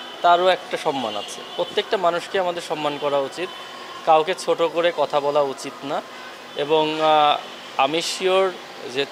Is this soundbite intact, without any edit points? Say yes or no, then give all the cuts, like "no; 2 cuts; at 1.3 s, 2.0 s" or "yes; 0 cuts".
yes; 0 cuts